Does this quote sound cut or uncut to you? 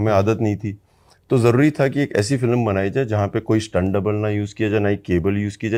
uncut